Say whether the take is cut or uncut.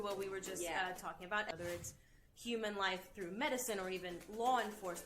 cut